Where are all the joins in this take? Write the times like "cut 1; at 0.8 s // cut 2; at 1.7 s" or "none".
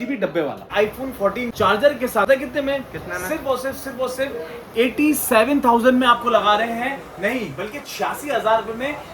cut 1; at 0.9 s // cut 2; at 2.3 s